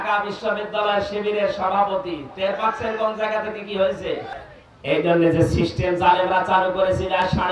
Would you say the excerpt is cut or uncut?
cut